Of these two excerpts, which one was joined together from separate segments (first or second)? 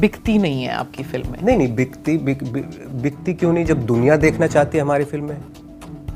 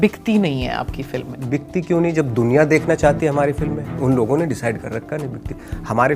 second